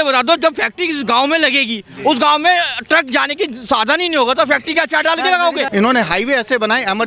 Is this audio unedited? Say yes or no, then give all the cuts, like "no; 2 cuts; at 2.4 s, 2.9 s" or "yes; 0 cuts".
no; 1 cut; at 5.7 s